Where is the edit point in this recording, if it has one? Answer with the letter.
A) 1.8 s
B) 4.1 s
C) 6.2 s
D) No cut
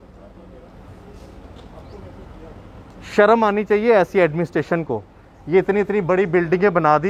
D